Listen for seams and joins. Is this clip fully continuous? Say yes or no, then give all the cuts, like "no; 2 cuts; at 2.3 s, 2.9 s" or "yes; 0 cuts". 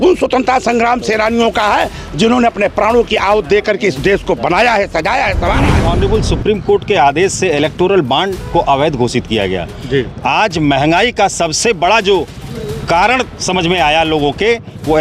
no; 1 cut; at 5.9 s